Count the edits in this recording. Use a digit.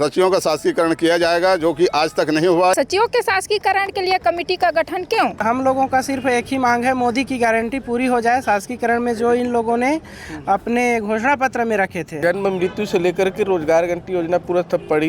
3